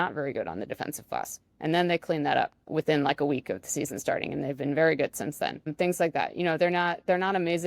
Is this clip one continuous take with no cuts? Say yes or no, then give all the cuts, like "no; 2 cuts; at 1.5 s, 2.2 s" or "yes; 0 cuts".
no; 2 cuts; at 2.6 s, 5.7 s